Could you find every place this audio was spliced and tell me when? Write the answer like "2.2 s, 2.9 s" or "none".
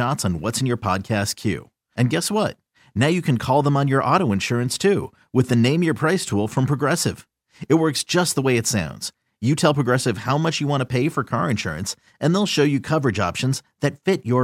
none